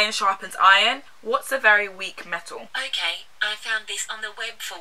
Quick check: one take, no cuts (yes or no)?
yes